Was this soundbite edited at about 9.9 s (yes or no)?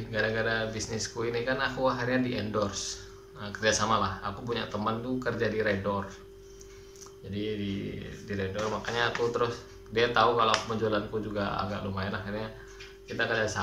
no